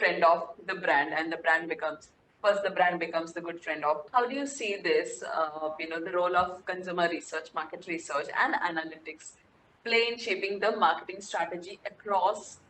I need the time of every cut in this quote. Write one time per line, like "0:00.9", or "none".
0:04.0